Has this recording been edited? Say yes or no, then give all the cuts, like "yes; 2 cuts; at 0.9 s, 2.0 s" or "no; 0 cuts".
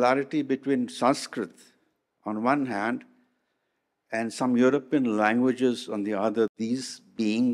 no; 0 cuts